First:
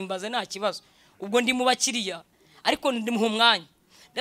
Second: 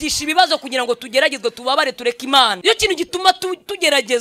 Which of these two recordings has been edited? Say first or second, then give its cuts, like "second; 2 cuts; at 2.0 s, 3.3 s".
second; 1 cut; at 2.6 s